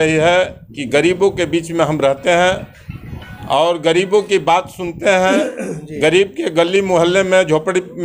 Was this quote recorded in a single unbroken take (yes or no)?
yes